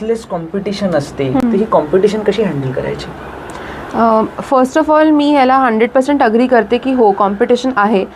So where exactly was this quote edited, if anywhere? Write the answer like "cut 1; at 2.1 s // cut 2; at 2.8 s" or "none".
cut 1; at 1.4 s